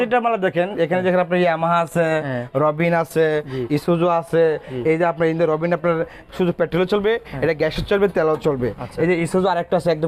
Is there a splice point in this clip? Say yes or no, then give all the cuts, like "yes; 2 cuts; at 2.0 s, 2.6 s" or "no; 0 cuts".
no; 0 cuts